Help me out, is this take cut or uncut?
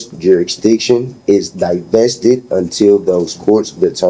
uncut